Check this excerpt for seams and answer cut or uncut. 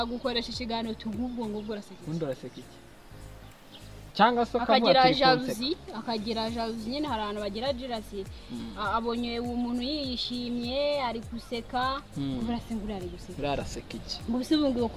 uncut